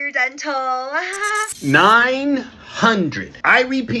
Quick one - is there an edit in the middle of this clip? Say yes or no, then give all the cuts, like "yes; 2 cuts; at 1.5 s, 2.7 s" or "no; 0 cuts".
yes; 1 cut; at 1.5 s